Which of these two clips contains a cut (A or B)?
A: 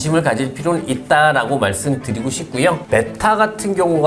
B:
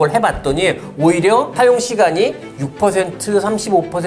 A